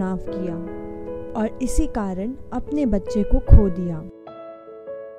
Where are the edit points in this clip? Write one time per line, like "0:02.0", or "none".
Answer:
0:04.1